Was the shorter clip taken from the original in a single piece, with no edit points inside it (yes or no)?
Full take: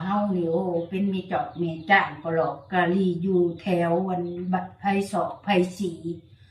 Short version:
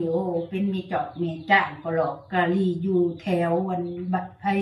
yes